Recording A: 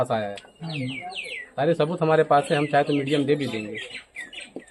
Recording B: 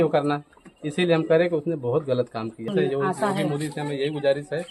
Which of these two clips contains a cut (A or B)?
B